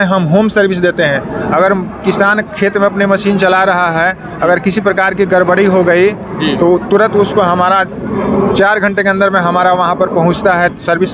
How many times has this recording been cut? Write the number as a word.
zero